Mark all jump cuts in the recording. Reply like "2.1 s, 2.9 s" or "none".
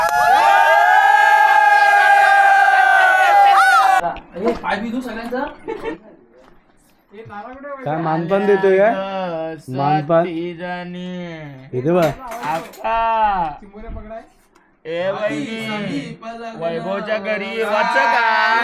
4.0 s